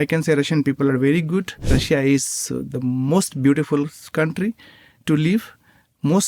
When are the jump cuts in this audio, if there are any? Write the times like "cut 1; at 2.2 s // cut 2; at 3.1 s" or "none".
cut 1; at 1.7 s